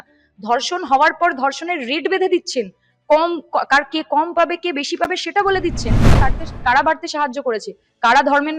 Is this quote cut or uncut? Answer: cut